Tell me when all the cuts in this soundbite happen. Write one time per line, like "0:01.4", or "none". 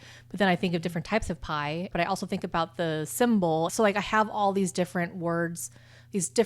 0:01.9
0:03.7